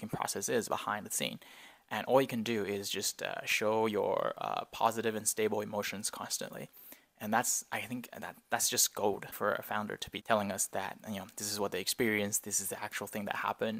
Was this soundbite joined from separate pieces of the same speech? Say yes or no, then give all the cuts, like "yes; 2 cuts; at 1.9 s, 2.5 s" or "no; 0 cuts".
yes; 1 cut; at 9.7 s